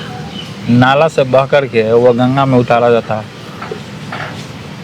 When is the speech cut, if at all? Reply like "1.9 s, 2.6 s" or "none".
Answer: none